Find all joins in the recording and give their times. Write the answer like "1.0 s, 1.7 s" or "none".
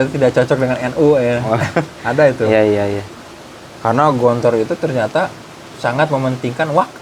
none